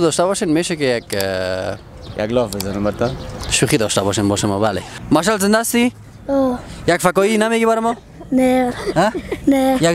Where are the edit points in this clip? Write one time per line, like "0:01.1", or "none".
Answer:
0:04.9